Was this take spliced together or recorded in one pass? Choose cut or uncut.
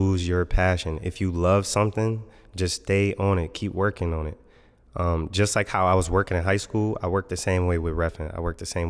uncut